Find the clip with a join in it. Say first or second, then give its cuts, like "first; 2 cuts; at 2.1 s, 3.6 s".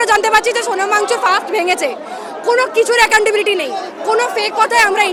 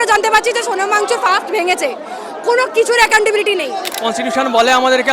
second; 1 cut; at 3.9 s